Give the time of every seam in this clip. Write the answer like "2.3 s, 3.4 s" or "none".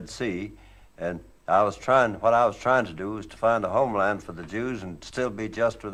none